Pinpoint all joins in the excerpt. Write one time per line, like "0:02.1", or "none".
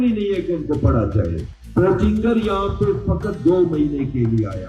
0:01.5